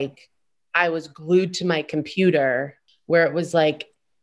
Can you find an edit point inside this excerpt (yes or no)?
yes